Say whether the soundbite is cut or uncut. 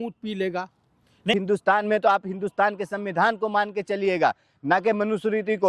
cut